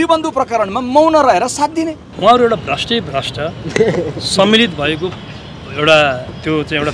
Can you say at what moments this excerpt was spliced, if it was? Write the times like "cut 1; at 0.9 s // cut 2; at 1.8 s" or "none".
cut 1; at 2.1 s